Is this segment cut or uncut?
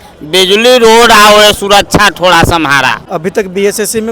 cut